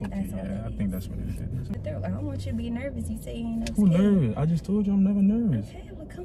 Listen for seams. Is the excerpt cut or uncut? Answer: cut